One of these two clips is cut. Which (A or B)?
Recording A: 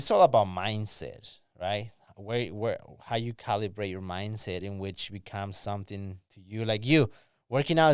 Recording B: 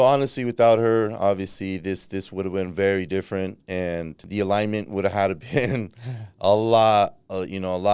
B